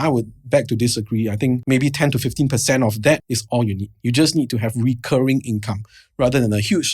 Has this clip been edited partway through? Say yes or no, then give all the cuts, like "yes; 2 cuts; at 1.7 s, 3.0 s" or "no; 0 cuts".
yes; 2 cuts; at 1.6 s, 3.3 s